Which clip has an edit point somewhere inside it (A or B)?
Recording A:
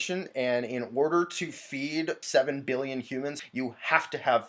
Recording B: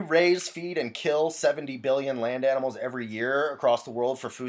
A